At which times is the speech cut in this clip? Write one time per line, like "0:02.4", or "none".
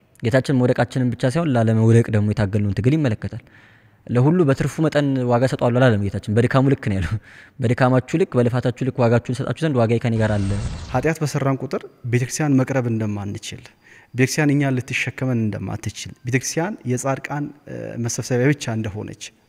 0:10.6